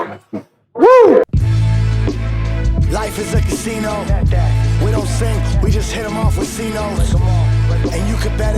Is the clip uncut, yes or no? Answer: no